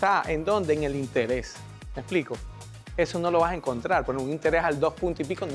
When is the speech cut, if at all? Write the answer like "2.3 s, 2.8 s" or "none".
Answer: none